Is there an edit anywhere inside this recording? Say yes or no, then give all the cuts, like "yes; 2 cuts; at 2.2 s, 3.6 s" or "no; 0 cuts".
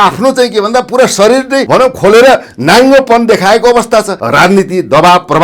yes; 2 cuts; at 1.6 s, 4.2 s